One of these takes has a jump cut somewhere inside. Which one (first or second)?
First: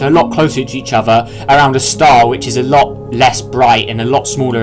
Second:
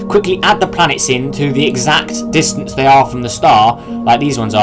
second